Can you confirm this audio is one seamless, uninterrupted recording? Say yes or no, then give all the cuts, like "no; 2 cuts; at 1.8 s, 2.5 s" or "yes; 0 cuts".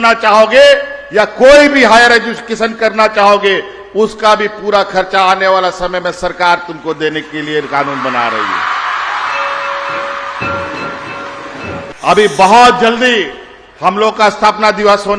no; 1 cut; at 11.9 s